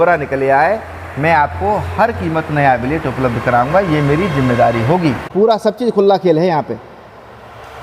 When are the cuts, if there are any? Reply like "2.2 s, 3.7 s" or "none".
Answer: 5.2 s